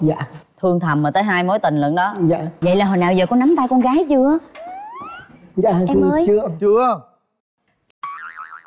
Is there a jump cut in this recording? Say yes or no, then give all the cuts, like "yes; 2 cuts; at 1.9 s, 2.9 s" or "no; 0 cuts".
yes; 1 cut; at 2.5 s